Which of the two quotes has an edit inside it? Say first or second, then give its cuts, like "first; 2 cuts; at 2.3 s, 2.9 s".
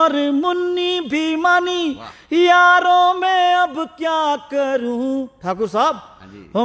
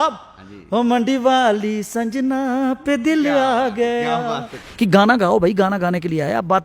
second; 1 cut; at 4.5 s